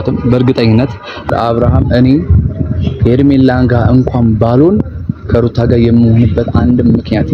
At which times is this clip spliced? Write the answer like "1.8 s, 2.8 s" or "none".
1.3 s